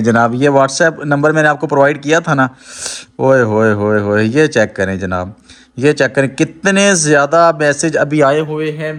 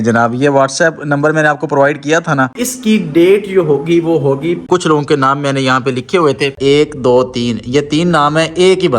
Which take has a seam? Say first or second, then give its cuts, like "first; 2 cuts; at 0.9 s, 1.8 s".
second; 3 cuts; at 2.7 s, 4.6 s, 6.5 s